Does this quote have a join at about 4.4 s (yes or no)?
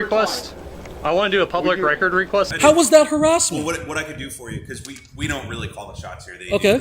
no